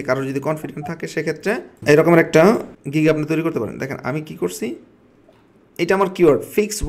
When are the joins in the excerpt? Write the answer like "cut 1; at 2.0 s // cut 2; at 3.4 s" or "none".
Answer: cut 1; at 1.8 s // cut 2; at 2.8 s